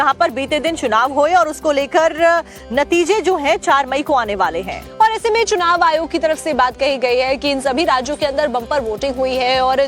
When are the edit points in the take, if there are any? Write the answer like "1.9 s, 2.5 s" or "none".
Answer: 2.2 s

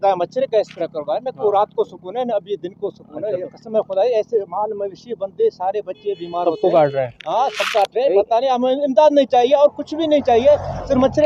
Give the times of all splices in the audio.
none

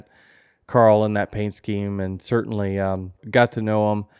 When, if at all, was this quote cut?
3.2 s

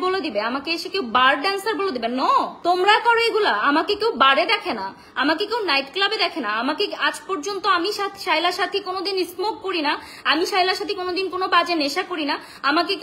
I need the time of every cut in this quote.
2.5 s

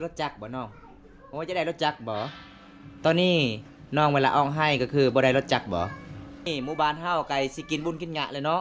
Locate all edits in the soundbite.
6.5 s

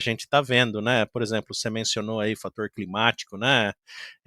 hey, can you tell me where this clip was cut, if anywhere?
none

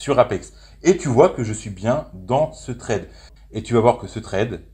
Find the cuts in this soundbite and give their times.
3.3 s

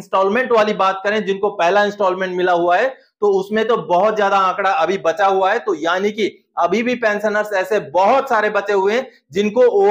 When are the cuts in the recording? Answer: none

